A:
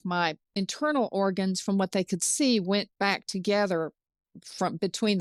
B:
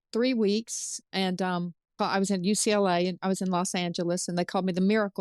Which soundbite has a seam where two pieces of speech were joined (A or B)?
B